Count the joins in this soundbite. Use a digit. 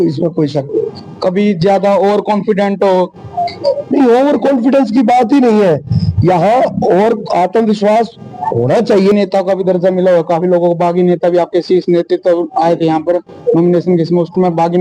1